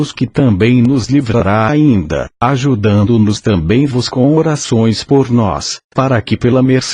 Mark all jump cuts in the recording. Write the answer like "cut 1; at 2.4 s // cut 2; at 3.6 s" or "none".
none